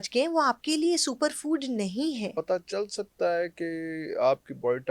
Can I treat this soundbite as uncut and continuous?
no; 1 cut; at 2.3 s

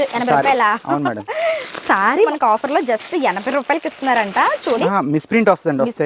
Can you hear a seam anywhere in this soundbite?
yes; 2 cuts; at 2.3 s, 4.8 s

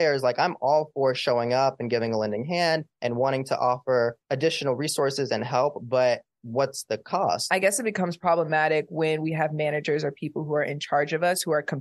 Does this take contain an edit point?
yes; 3 cuts; at 2.9 s, 4.2 s, 7.4 s

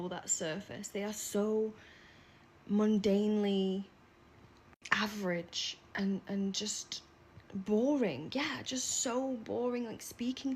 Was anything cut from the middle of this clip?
yes; 1 cut; at 6.6 s

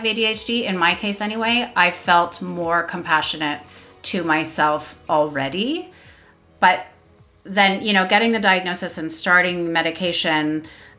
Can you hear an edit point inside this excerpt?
no; 0 cuts

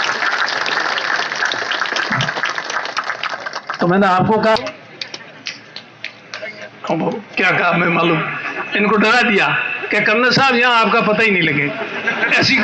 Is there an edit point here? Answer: yes; 1 cut; at 4.6 s

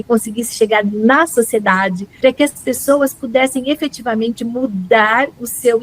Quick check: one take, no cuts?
no; 1 cut; at 2.0 s

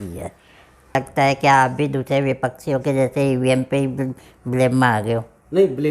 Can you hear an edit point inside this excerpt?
yes; 1 cut; at 1.0 s

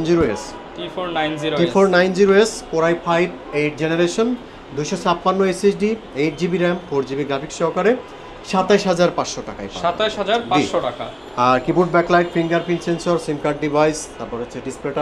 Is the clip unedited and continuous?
yes; 0 cuts

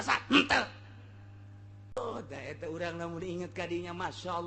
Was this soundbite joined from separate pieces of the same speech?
yes; 1 cut; at 2.0 s

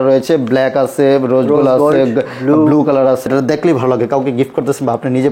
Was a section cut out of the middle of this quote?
yes; 1 cut; at 3.2 s

